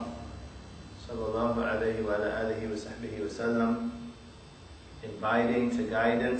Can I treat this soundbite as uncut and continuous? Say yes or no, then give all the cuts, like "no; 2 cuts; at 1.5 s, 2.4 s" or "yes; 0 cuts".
no; 1 cut; at 3.1 s